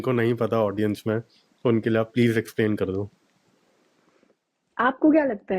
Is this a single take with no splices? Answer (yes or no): yes